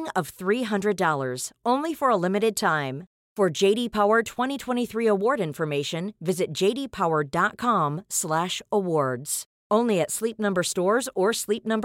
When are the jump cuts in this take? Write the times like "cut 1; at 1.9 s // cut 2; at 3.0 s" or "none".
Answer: none